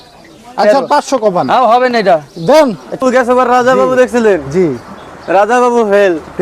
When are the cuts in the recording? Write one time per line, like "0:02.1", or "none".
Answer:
0:03.0